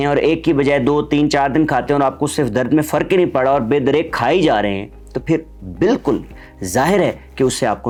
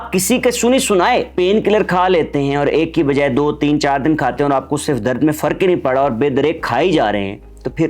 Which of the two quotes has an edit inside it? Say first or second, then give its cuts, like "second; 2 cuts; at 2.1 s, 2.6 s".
second; 1 cut; at 1.3 s